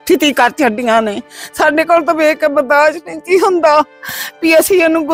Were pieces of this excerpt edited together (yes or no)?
no